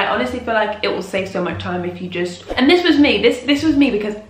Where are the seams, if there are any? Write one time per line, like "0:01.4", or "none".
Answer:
0:02.4